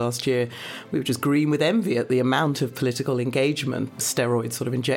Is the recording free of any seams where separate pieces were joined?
no; 1 cut; at 4.0 s

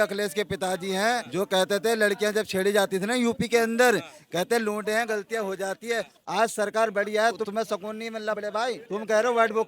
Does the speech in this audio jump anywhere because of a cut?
yes; 2 cuts; at 6.2 s, 8.4 s

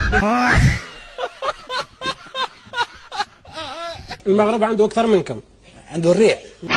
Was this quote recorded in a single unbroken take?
no; 1 cut; at 4.1 s

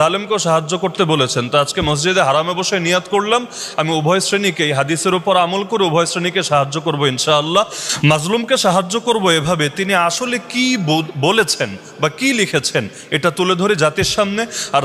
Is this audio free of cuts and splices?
yes; 0 cuts

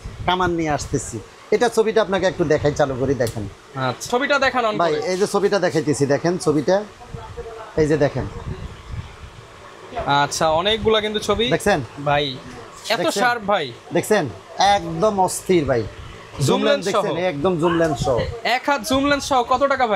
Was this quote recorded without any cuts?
yes; 0 cuts

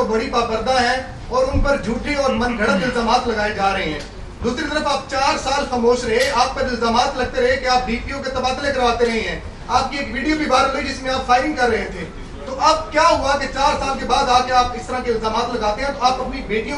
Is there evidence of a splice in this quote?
no; 0 cuts

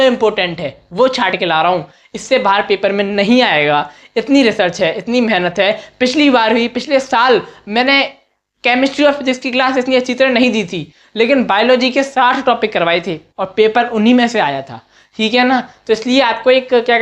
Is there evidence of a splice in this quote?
no; 0 cuts

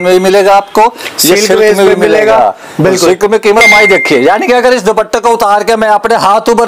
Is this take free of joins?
no; 1 cut; at 3.7 s

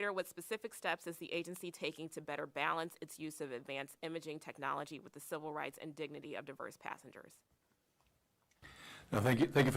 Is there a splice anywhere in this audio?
no; 0 cuts

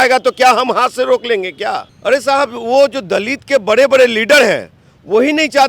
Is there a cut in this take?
yes; 1 cut; at 1.9 s

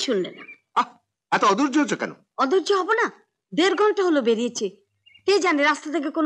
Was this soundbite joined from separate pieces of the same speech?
no; 0 cuts

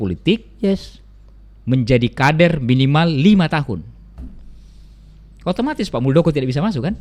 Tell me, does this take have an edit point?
no; 0 cuts

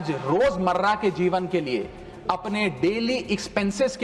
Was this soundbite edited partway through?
no; 0 cuts

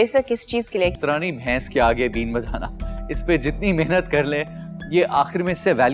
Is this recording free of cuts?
no; 1 cut; at 1.0 s

